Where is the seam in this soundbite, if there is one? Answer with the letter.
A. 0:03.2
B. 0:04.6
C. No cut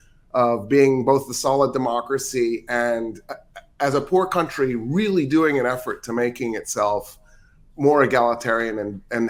C